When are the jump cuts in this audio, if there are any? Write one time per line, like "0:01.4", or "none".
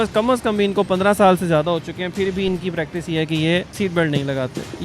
0:03.7